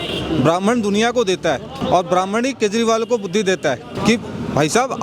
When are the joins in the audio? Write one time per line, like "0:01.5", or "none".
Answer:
0:01.8
0:03.9